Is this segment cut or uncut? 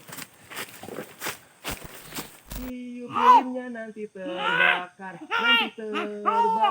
cut